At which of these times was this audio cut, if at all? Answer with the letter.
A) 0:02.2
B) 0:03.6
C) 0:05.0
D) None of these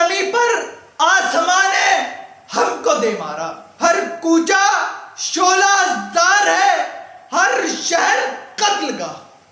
B